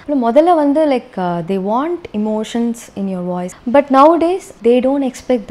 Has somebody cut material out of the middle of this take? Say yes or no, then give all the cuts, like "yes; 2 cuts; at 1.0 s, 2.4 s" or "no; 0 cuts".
yes; 2 cuts; at 3.5 s, 4.5 s